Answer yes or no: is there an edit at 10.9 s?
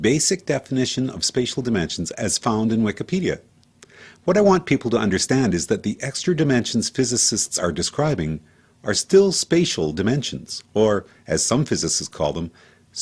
no